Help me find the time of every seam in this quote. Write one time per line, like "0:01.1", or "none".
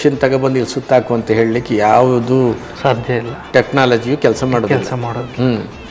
none